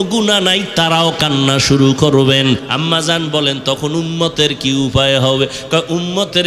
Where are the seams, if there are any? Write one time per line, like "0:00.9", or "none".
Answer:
0:02.7